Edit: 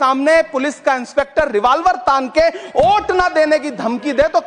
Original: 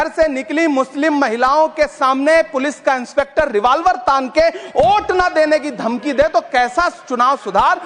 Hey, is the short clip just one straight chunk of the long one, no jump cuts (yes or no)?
yes